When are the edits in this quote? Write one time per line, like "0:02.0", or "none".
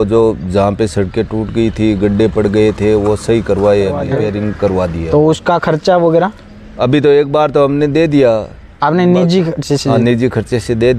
0:04.1